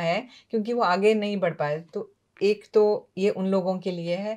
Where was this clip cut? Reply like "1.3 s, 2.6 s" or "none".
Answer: none